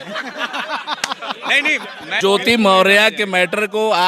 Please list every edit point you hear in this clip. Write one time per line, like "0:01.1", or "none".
none